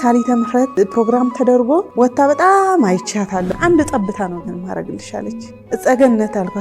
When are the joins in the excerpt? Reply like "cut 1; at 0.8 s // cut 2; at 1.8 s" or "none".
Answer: cut 1; at 0.8 s // cut 2; at 1.9 s // cut 3; at 3.5 s // cut 4; at 5.5 s